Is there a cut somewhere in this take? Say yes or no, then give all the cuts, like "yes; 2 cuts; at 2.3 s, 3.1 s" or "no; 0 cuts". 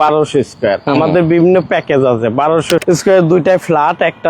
yes; 1 cut; at 2.8 s